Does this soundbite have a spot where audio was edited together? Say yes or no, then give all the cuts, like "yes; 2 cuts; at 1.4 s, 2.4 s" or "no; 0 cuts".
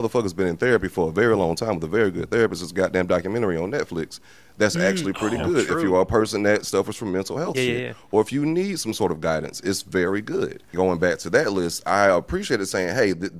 no; 0 cuts